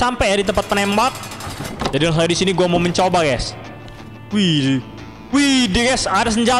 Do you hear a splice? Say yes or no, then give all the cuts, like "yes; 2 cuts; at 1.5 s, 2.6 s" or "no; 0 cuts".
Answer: no; 0 cuts